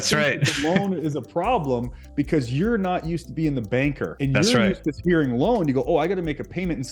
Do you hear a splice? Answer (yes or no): yes